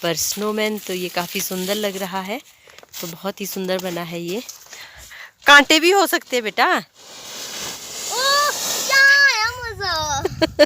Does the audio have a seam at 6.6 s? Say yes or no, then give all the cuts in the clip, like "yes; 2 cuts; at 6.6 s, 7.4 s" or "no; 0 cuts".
no; 1 cut; at 4.6 s